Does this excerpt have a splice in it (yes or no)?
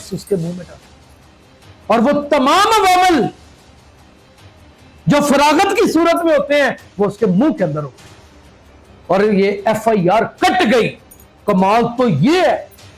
no